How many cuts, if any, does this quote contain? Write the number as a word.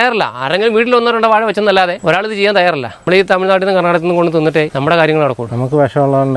three